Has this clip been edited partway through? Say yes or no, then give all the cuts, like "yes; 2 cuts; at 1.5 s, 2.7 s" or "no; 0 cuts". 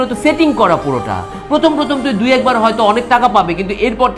no; 0 cuts